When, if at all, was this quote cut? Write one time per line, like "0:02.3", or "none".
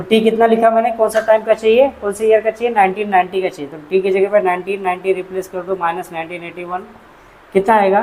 none